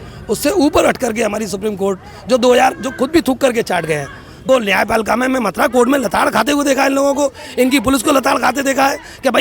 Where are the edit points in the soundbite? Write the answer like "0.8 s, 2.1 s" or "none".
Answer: 4.4 s